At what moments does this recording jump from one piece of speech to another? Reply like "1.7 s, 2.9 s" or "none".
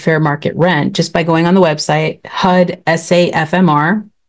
none

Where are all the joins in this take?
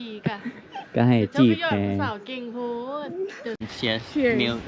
3.7 s

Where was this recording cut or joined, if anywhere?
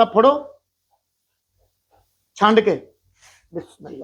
none

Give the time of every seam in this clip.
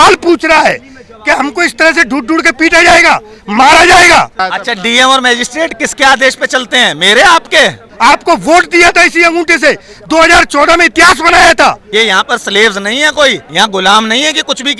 4.4 s, 7.9 s, 11.8 s, 13.4 s

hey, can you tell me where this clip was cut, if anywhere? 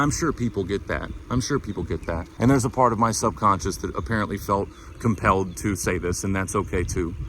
2.3 s

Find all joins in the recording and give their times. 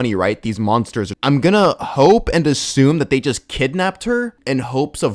1.1 s, 4.4 s

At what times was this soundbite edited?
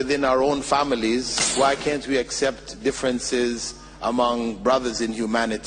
1.4 s

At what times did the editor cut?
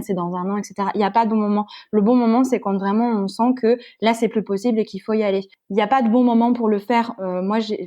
5.5 s

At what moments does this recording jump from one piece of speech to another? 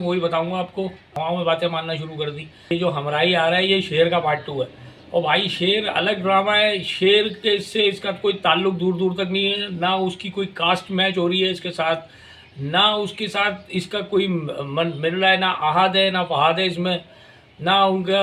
1.0 s, 2.6 s

